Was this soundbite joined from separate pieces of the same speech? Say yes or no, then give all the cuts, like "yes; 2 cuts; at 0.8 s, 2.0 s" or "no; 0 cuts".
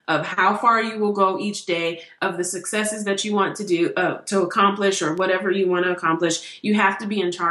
no; 0 cuts